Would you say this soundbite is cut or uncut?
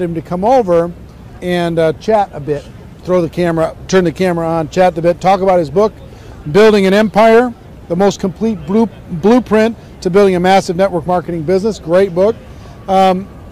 cut